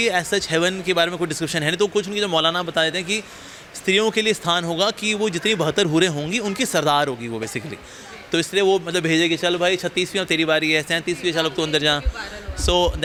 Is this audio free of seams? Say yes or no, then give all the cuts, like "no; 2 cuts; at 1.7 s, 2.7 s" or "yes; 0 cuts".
yes; 0 cuts